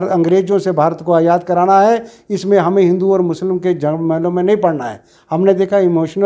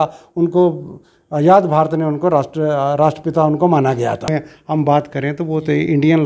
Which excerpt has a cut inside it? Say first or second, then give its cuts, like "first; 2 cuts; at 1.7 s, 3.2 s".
second; 1 cut; at 4.5 s